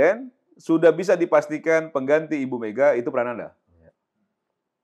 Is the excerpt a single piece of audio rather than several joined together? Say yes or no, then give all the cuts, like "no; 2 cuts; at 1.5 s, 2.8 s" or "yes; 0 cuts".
yes; 0 cuts